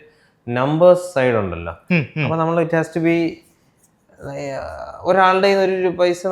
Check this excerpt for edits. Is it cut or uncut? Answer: uncut